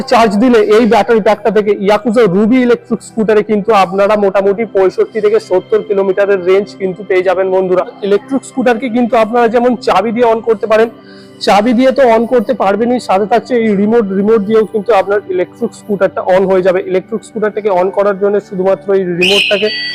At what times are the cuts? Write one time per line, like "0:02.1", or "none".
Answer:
0:08.0